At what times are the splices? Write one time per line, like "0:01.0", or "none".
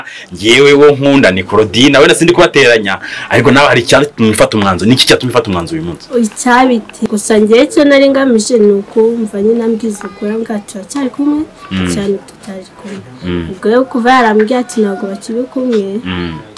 0:07.1